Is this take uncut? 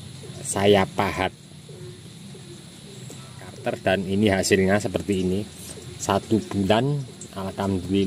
no; 1 cut; at 3.6 s

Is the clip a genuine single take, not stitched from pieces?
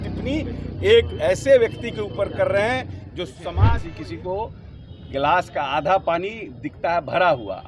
no; 1 cut; at 3.7 s

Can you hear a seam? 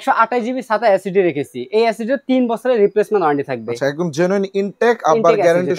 no; 0 cuts

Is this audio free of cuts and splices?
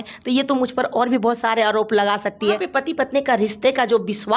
no; 1 cut; at 2.6 s

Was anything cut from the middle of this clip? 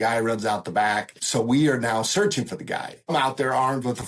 yes; 2 cuts; at 1.2 s, 3.1 s

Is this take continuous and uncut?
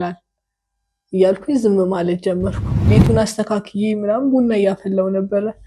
no; 1 cut; at 2.9 s

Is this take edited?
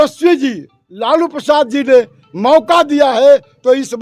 no; 0 cuts

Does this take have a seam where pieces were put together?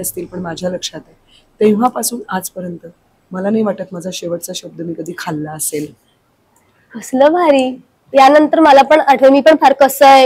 no; 0 cuts

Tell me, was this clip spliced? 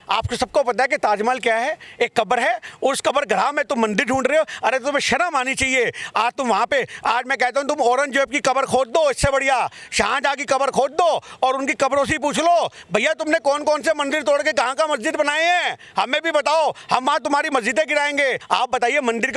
yes; 1 cut; at 18.4 s

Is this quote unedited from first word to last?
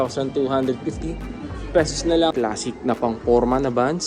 no; 1 cut; at 2.3 s

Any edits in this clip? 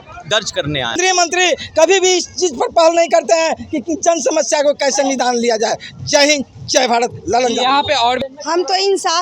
yes; 2 cuts; at 1.0 s, 8.2 s

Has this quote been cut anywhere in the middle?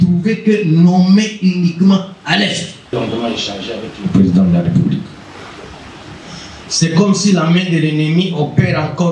yes; 1 cut; at 2.9 s

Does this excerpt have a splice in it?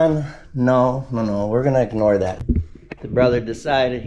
yes; 1 cut; at 2.6 s

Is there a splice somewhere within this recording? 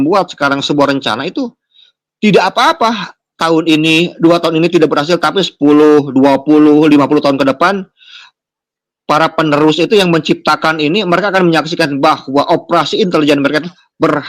no; 0 cuts

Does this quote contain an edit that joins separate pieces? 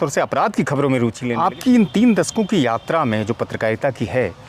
yes; 1 cut; at 1.3 s

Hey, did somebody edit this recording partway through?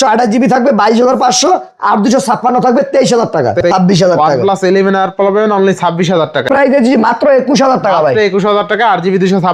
yes; 2 cuts; at 3.7 s, 6.4 s

